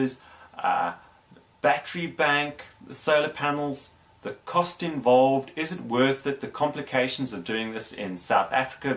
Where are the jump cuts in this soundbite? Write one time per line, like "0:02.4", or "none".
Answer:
0:06.9